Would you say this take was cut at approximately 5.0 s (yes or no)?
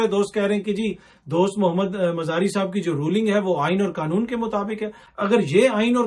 yes